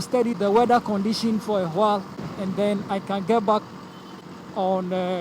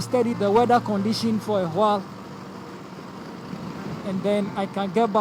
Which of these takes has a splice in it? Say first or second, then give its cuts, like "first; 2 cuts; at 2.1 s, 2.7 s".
first; 1 cut; at 2.2 s